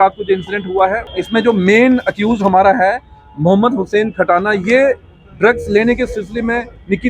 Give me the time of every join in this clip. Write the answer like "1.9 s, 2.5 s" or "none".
1.1 s